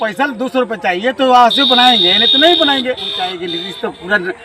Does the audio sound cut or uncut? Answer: cut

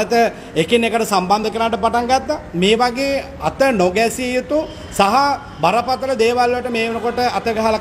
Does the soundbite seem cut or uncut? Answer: uncut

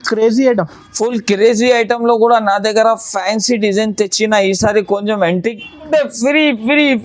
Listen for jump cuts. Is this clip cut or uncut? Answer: cut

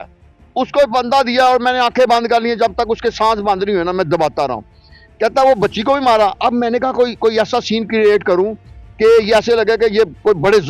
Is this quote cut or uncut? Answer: uncut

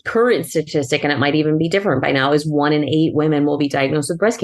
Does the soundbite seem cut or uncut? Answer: uncut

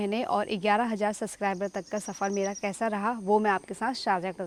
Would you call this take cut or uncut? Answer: uncut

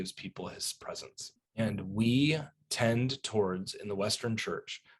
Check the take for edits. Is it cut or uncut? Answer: cut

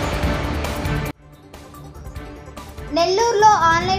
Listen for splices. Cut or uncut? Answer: cut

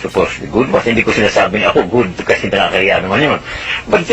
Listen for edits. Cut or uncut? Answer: uncut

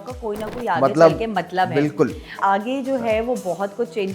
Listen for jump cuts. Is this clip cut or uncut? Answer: cut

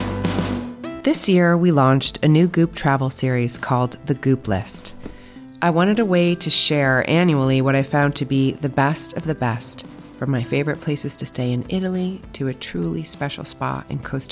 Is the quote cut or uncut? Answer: cut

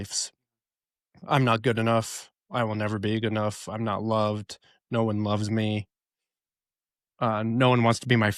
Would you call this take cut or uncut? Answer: uncut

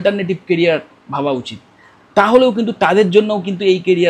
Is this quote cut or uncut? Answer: uncut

